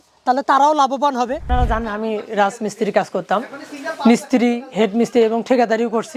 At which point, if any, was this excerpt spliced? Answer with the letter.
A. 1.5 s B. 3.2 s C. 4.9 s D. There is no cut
A